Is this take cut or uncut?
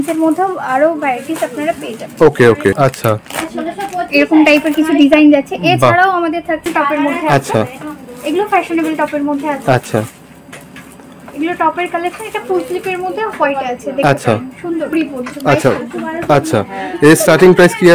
cut